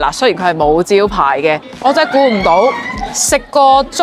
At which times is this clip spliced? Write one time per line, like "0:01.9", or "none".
0:01.7